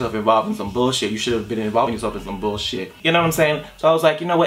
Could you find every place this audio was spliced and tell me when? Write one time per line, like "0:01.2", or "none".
0:02.5